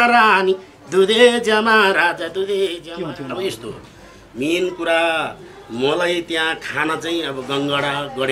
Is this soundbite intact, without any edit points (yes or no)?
no